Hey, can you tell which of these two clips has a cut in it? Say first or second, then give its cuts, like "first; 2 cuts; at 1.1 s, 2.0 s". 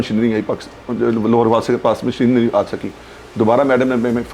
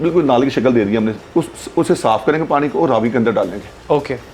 second; 1 cut; at 1.2 s